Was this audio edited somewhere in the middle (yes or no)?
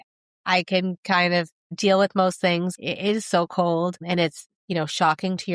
yes